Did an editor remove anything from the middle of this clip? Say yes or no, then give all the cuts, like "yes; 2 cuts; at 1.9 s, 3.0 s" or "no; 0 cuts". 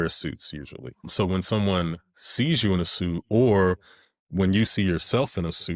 yes; 1 cut; at 1.1 s